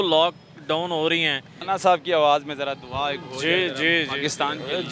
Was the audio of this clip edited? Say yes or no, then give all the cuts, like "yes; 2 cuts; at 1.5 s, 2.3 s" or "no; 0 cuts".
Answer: yes; 1 cut; at 1.6 s